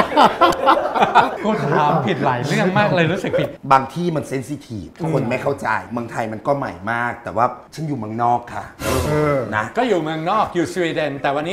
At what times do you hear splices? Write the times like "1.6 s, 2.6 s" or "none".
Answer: 1.3 s, 3.6 s, 9.7 s